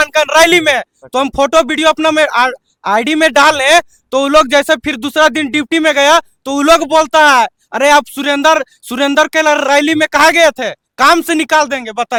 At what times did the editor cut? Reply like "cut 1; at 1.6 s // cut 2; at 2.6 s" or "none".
none